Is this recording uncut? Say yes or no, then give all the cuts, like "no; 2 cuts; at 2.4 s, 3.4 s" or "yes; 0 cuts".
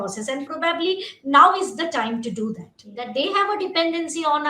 no; 1 cut; at 3.0 s